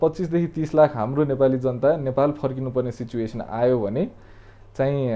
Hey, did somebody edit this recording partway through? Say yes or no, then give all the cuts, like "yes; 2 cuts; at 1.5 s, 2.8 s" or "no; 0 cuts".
no; 0 cuts